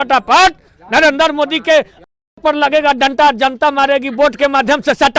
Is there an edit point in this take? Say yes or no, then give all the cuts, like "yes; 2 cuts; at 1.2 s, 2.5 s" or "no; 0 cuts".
no; 0 cuts